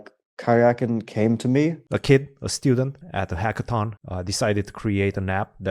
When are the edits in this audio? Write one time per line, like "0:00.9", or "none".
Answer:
0:01.9
0:03.0
0:04.0